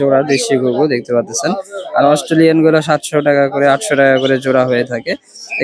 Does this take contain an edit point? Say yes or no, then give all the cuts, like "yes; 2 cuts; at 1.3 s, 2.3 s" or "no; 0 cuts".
no; 0 cuts